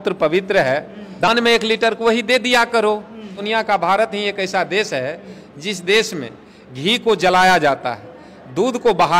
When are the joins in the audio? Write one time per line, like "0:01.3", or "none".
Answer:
0:01.3
0:03.4